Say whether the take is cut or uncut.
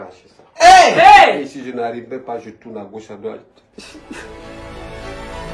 uncut